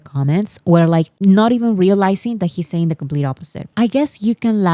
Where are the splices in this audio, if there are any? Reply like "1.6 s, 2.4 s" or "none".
1.2 s, 3.7 s